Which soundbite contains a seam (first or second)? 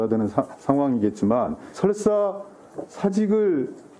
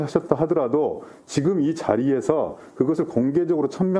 first